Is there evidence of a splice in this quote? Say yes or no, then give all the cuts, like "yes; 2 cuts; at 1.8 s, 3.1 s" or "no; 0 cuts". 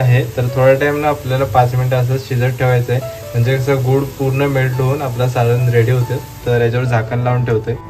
no; 0 cuts